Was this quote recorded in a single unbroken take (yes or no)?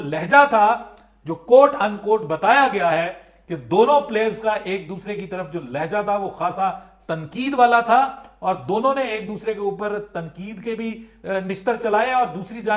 yes